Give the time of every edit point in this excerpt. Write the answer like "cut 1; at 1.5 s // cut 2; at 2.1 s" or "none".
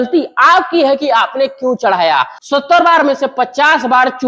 cut 1; at 2.4 s